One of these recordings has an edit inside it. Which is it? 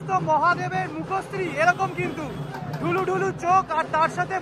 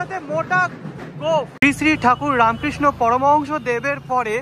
second; 1 cut; at 1.7 s

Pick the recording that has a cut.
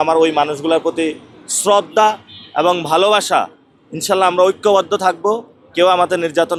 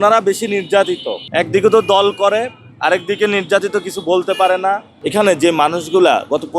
second; 1 cut; at 4.9 s

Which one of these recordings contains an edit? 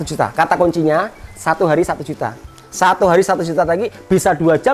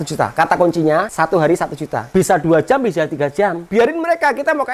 second; 3 cuts; at 1.1 s, 2.0 s, 3.6 s

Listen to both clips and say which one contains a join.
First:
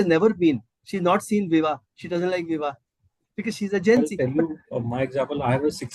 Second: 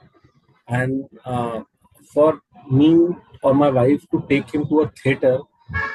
first; 1 cut; at 4.1 s

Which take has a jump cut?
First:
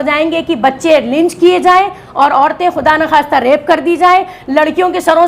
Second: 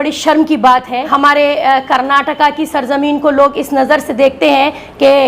second; 1 cut; at 1.1 s

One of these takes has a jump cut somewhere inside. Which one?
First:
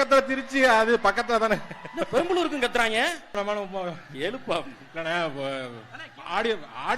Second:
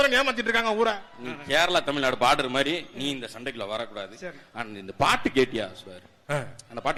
first; 1 cut; at 3.4 s

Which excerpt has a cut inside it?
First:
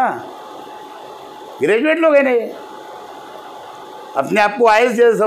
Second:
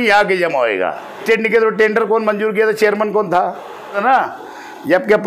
second; 2 cuts; at 1.2 s, 4.0 s

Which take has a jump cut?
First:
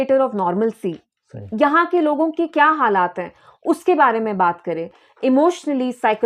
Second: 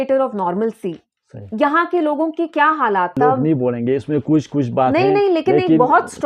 second; 1 cut; at 3.2 s

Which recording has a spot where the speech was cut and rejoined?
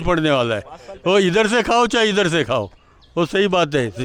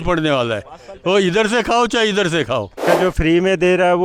second; 1 cut; at 2.9 s

